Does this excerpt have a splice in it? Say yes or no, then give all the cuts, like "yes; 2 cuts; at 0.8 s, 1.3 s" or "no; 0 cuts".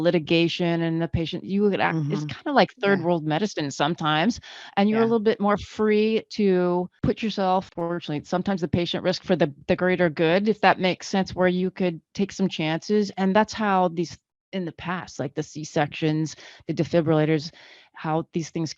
yes; 2 cuts; at 6.9 s, 7.7 s